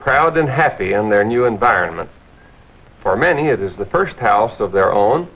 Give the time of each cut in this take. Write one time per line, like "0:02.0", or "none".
none